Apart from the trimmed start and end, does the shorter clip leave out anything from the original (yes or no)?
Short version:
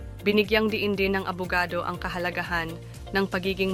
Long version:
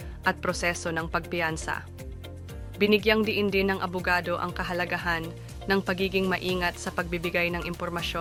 no